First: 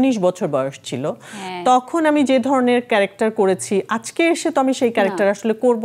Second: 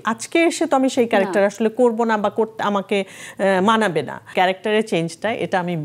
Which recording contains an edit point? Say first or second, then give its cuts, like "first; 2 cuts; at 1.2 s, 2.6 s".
second; 1 cut; at 4.3 s